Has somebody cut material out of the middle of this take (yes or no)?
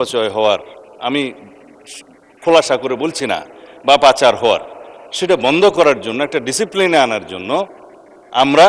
no